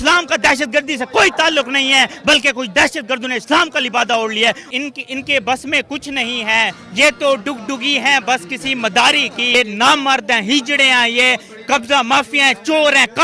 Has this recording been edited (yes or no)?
yes